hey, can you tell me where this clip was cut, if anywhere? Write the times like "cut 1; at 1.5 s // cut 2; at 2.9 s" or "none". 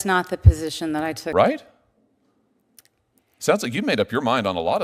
cut 1; at 1.2 s